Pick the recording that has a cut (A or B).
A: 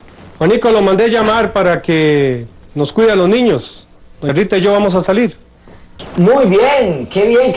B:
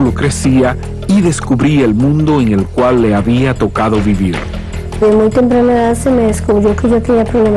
B